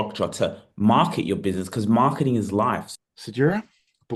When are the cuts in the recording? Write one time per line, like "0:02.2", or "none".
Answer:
0:02.9